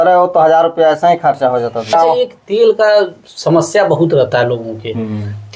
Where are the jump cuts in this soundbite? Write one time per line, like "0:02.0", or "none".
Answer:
0:01.9